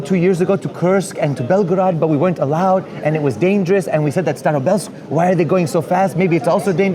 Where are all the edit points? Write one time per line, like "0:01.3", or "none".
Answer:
none